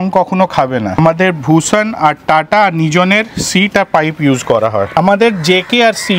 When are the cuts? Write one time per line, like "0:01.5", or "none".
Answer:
0:01.0
0:04.9